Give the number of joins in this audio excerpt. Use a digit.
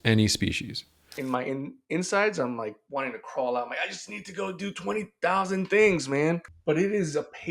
3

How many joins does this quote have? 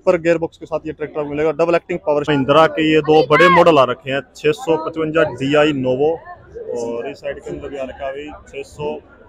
1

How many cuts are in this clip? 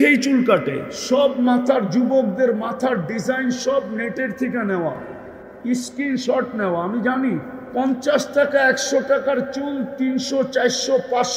2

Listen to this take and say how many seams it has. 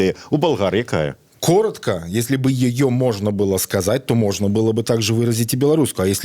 1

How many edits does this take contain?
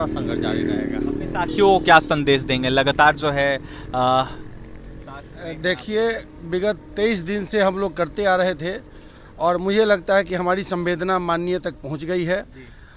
0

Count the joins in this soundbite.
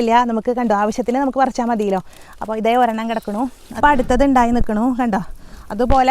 1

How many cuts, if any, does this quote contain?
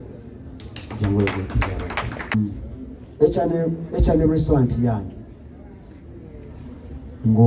1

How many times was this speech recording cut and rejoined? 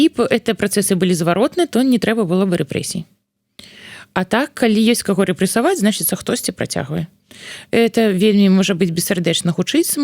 0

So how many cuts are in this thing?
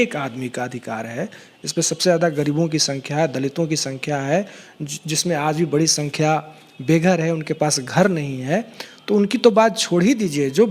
0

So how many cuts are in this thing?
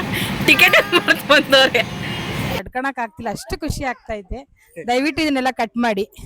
1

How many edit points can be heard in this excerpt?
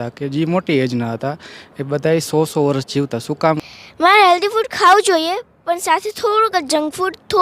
1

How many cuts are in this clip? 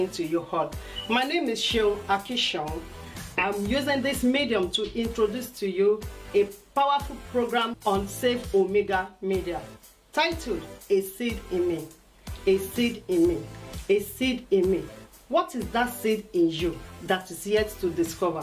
1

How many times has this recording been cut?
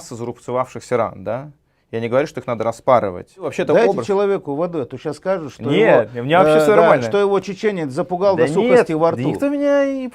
1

